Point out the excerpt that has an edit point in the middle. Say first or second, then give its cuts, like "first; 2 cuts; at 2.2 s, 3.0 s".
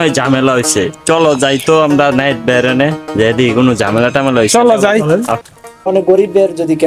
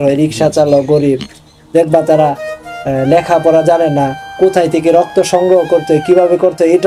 first; 1 cut; at 5.9 s